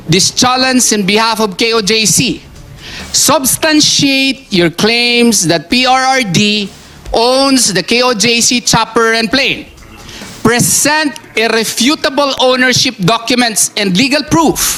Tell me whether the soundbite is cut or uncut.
uncut